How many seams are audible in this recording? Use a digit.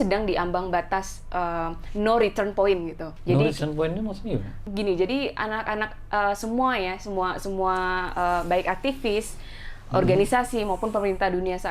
2